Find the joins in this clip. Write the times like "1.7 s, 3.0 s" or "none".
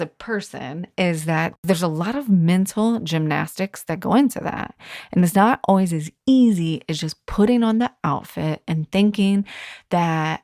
1.5 s